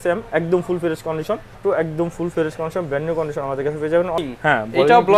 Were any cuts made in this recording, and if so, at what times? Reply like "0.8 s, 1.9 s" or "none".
1.6 s, 4.2 s